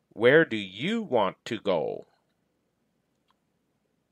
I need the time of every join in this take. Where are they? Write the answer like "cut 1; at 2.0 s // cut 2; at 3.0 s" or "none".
none